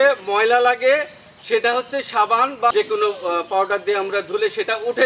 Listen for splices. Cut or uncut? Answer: cut